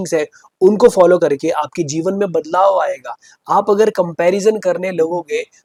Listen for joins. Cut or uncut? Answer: uncut